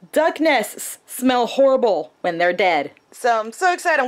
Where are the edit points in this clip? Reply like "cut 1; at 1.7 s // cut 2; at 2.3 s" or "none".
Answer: cut 1; at 3.0 s